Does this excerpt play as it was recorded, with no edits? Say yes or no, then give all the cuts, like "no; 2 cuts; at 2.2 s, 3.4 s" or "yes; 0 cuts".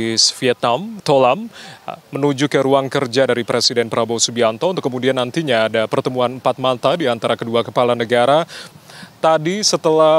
no; 2 cuts; at 0.9 s, 8.7 s